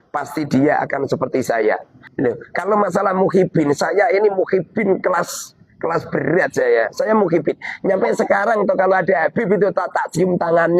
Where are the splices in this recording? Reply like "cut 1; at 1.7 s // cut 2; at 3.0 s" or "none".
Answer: cut 1; at 2.0 s

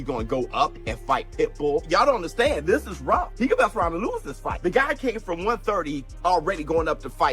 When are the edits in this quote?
none

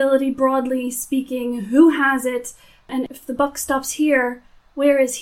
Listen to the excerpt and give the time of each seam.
cut 1; at 2.9 s

